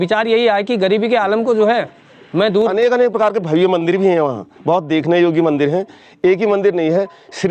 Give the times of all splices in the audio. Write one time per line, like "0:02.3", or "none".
0:02.7